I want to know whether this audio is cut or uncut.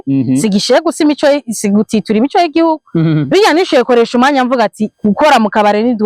uncut